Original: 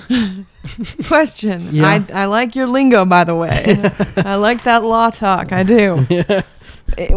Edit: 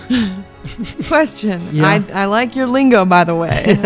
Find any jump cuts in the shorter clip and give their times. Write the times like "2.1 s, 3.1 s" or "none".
none